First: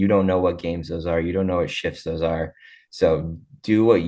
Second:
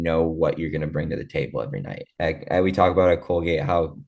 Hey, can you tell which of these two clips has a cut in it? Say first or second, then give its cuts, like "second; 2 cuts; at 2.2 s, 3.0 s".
second; 1 cut; at 2.1 s